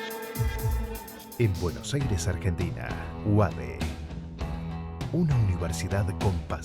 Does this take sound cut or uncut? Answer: cut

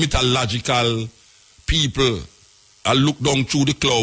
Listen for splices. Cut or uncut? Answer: uncut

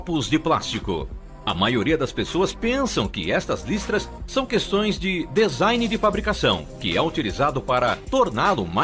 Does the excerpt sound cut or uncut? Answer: uncut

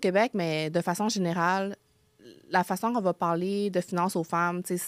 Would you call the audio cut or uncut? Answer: uncut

